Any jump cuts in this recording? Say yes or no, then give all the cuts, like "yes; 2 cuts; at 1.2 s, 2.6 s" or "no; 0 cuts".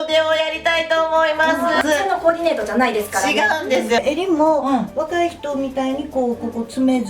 yes; 2 cuts; at 1.8 s, 4.0 s